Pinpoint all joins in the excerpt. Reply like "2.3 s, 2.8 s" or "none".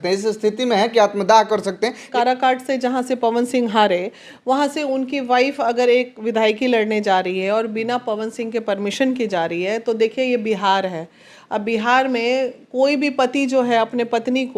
2.0 s

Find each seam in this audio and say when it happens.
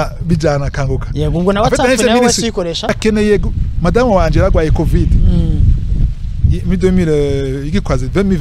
3.0 s

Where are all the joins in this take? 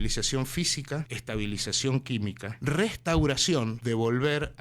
1.1 s, 2.5 s, 3.8 s

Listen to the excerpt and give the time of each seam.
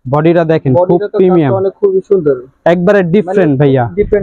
none

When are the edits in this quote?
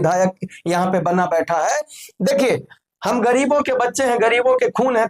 1.9 s

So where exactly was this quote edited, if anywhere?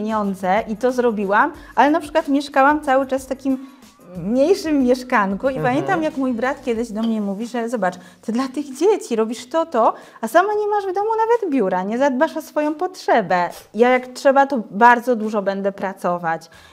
13.5 s

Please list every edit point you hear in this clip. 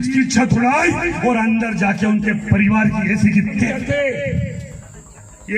3.8 s

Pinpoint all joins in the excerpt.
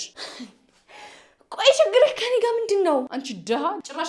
3.1 s

